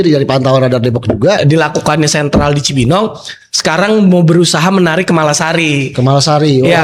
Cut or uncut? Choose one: cut